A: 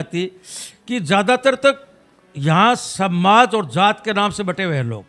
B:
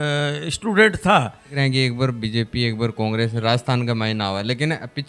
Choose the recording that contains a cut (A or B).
B